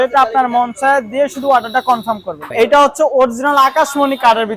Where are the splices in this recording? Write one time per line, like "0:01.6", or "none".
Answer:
0:02.4